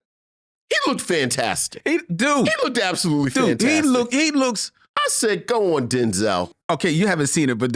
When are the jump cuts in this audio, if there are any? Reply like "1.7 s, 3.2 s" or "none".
6.4 s